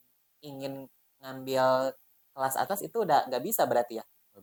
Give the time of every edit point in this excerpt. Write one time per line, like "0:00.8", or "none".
none